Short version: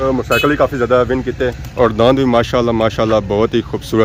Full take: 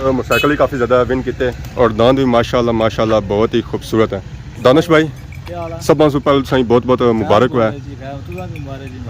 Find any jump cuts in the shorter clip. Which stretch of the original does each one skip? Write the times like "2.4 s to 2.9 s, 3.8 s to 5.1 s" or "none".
none